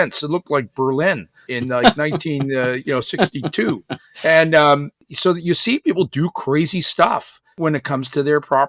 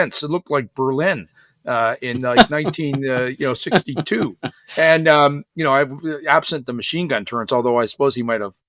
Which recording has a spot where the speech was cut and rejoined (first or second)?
first